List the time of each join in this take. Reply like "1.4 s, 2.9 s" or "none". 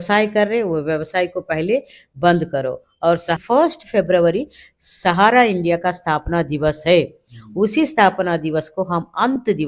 3.4 s